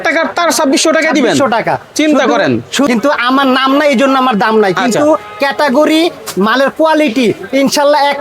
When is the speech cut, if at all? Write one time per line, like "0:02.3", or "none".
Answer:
0:02.9